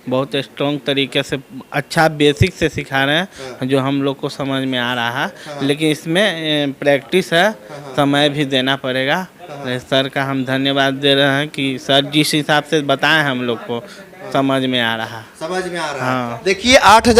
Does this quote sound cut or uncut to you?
uncut